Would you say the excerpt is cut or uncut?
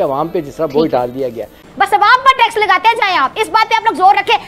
cut